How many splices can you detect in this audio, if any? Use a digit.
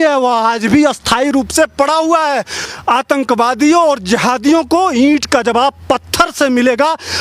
1